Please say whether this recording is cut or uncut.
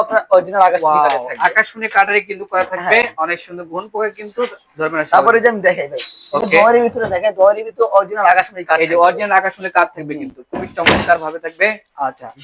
uncut